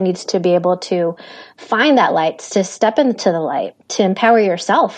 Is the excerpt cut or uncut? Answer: uncut